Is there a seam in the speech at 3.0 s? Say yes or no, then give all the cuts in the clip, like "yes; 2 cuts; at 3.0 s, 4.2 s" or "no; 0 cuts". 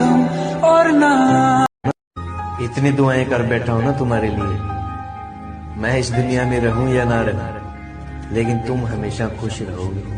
no; 1 cut; at 1.7 s